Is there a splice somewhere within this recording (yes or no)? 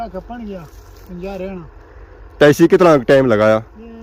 no